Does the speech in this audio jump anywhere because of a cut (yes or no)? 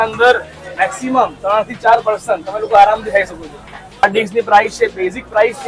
yes